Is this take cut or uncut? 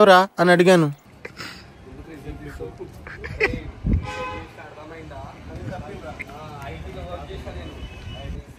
uncut